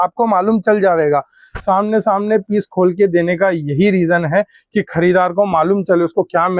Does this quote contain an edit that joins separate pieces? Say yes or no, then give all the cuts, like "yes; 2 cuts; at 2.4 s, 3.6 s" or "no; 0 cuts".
no; 0 cuts